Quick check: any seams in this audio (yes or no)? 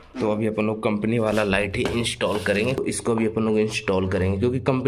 yes